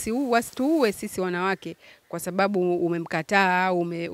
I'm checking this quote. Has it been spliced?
no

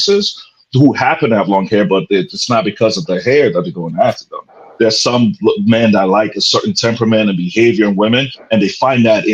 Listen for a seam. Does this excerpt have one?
no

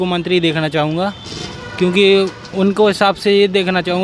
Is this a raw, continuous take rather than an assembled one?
yes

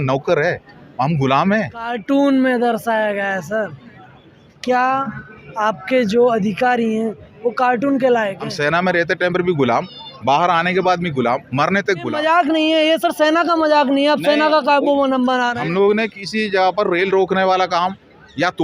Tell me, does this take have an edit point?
yes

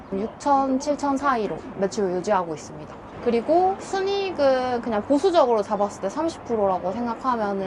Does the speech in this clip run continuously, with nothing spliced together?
yes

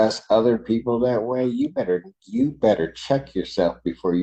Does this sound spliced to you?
no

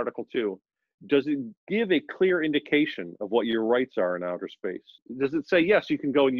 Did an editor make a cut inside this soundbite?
yes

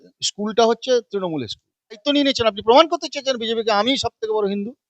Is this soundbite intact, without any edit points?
no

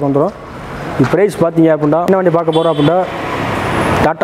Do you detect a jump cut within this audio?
yes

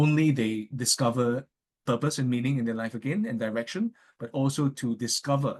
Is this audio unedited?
yes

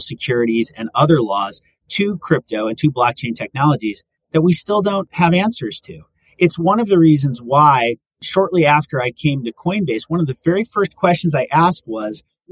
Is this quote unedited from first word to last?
no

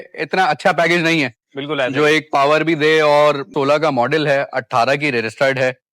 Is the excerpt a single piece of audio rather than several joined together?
no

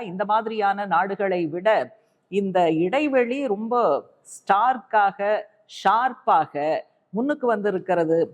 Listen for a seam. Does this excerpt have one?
no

